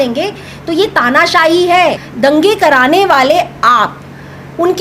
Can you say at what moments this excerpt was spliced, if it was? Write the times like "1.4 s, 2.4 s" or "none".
2.1 s